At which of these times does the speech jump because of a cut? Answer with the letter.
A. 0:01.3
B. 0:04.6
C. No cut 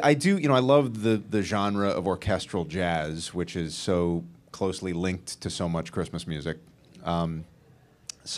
A